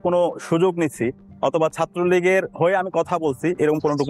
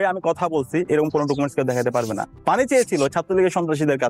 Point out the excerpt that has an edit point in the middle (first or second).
second